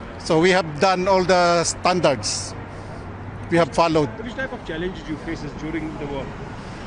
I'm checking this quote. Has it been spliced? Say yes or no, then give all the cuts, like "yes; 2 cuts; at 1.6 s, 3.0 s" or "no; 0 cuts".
no; 0 cuts